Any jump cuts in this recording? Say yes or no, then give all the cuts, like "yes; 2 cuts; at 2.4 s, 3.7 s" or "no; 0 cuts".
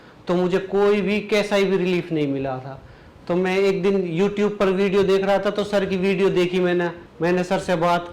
yes; 1 cut; at 7.0 s